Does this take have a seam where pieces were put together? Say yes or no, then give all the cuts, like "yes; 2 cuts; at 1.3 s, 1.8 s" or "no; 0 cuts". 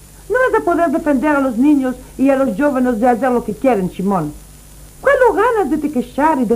no; 0 cuts